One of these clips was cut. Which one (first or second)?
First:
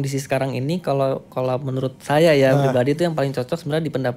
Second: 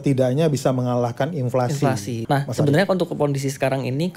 second